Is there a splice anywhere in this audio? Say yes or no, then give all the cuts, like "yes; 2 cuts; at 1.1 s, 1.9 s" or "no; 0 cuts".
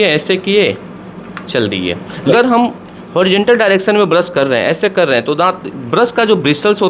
yes; 1 cut; at 2.3 s